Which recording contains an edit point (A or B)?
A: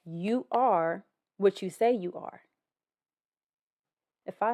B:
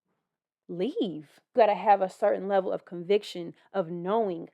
B